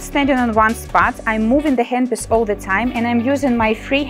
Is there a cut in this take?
no; 0 cuts

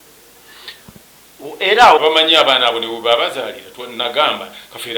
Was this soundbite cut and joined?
yes; 1 cut; at 2.0 s

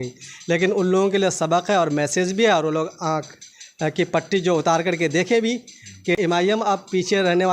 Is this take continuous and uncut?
no; 1 cut; at 6.1 s

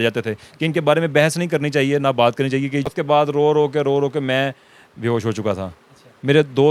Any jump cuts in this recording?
yes; 1 cut; at 2.9 s

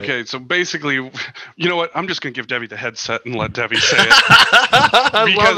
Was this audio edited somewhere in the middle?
yes; 1 cut; at 3.9 s

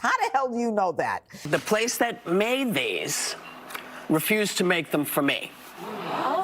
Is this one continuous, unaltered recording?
no; 1 cut; at 1.3 s

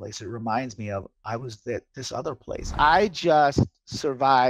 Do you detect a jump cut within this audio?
yes; 1 cut; at 2.7 s

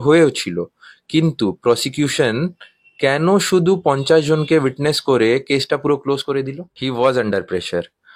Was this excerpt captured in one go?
no; 1 cut; at 6.6 s

